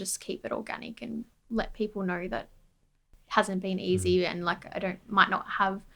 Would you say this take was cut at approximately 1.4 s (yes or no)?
yes